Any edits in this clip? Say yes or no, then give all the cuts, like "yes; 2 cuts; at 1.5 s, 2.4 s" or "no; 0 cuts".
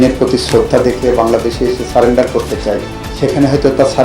yes; 1 cut; at 3.0 s